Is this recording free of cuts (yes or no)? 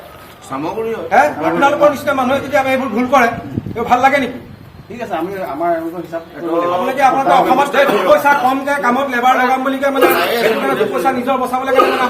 yes